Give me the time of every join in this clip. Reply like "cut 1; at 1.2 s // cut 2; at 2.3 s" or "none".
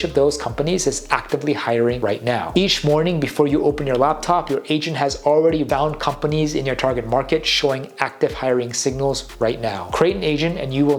cut 1; at 2.5 s // cut 2; at 5.7 s // cut 3; at 9.9 s